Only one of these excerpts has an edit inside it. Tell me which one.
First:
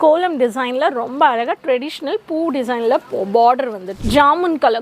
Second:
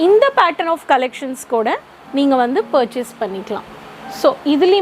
first; 1 cut; at 3.8 s

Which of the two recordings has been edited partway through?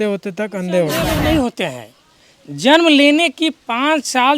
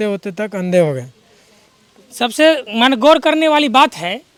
first; 1 cut; at 1.0 s

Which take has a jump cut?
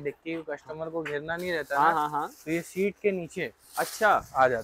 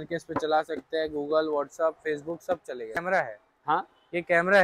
second; 1 cut; at 3.0 s

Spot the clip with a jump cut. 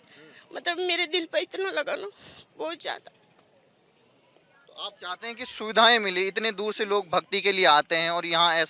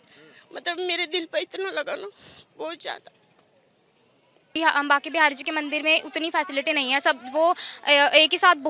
second; 1 cut; at 4.5 s

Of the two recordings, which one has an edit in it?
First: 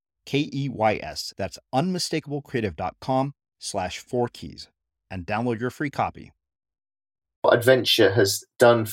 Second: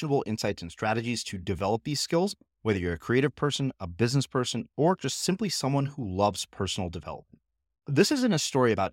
first; 1 cut; at 7.5 s

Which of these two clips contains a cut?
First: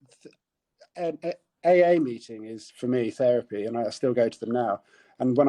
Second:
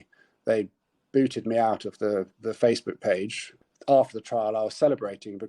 second; 1 cut; at 3.5 s

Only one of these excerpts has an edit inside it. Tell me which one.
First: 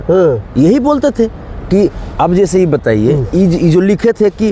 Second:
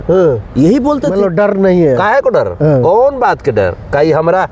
second; 1 cut; at 1.1 s

